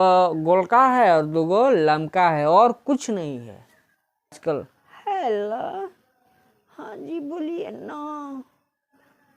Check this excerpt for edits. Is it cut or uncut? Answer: cut